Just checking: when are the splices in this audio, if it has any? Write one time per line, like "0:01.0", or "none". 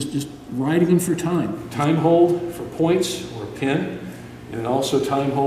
0:01.6